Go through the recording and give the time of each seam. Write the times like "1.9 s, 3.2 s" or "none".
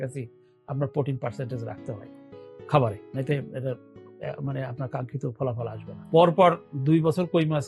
5.9 s